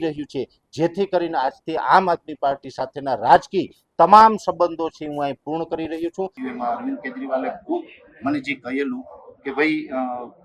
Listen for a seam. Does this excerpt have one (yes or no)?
yes